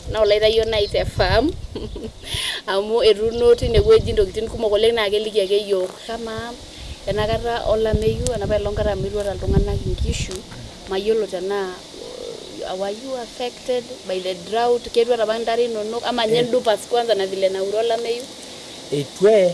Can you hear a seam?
yes; 1 cut; at 6.1 s

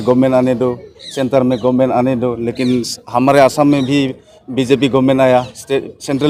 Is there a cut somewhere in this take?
no; 0 cuts

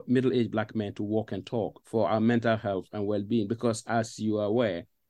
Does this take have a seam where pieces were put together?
yes; 1 cut; at 1.7 s

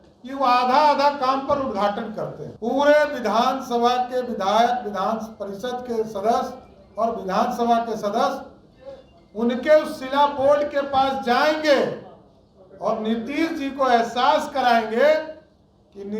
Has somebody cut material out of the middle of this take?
yes; 1 cut; at 2.4 s

